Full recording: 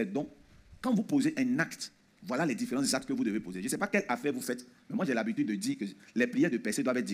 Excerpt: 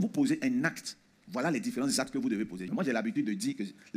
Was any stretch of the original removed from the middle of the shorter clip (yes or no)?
yes